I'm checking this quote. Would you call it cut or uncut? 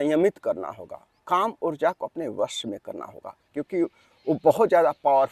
uncut